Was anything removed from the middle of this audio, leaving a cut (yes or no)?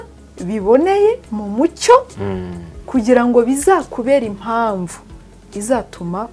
no